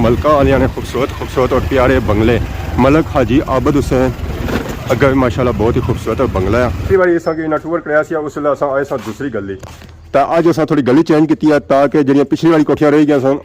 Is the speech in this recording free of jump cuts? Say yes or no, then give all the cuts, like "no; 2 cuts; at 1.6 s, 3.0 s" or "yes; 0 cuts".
no; 1 cut; at 6.8 s